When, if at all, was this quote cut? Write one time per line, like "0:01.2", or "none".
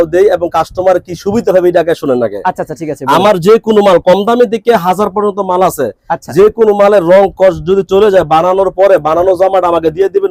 none

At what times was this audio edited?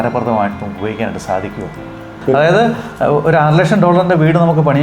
0:02.2

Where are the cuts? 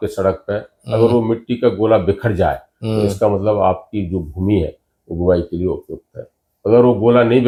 none

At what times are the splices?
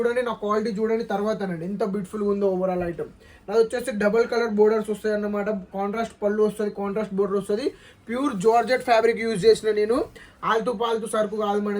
none

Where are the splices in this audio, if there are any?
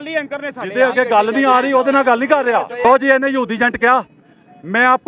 0:02.8

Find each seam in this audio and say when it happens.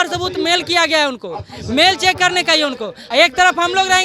0:02.9

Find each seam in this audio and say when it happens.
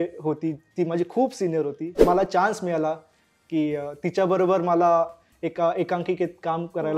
0:02.0

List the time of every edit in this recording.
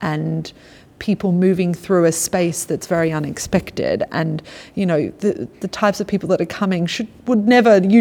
none

